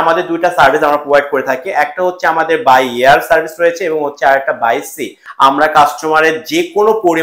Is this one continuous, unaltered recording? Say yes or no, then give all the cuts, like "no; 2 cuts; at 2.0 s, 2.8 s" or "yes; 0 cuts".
no; 1 cut; at 5.2 s